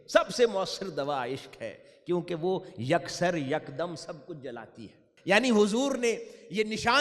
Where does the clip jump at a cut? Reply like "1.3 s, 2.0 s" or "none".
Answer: 5.1 s